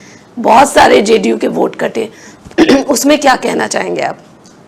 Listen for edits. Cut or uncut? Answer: uncut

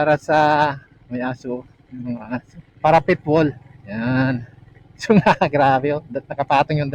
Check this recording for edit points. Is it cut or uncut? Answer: cut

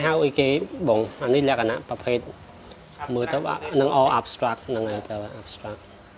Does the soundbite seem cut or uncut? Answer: uncut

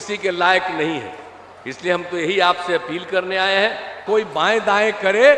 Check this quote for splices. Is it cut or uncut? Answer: cut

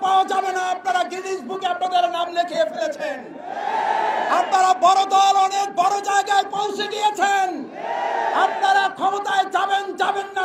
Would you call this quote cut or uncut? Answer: uncut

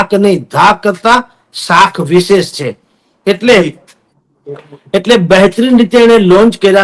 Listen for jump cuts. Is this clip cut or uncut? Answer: uncut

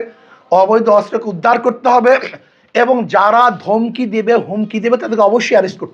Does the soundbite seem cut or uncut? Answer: uncut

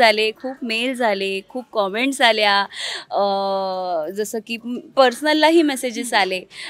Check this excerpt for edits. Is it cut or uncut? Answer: uncut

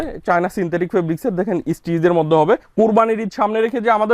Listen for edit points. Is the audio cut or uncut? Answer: cut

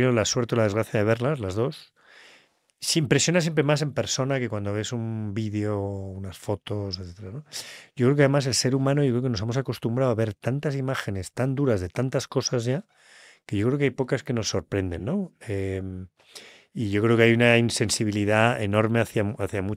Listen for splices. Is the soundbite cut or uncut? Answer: uncut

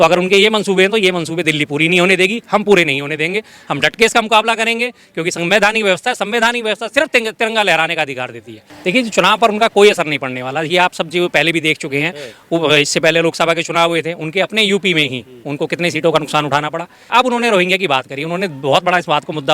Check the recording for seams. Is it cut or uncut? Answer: cut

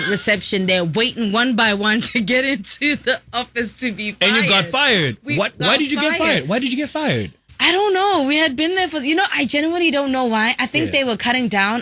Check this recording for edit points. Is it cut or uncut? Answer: uncut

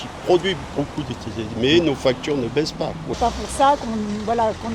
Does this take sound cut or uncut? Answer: cut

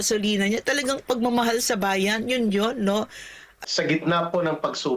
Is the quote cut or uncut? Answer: cut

